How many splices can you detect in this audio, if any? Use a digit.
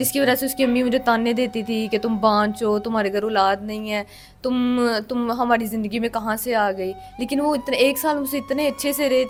0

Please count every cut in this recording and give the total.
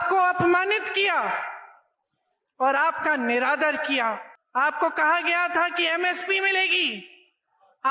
1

